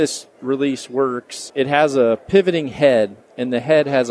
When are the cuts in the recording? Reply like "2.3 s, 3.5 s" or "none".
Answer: 1.4 s